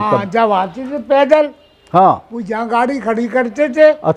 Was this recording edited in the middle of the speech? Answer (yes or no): no